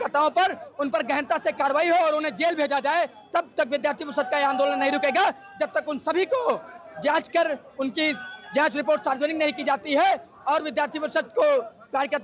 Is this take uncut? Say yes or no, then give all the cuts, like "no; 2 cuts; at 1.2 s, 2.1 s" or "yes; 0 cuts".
yes; 0 cuts